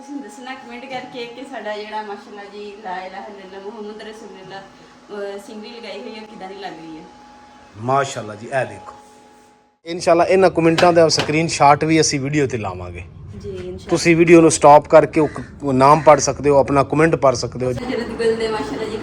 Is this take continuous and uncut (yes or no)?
no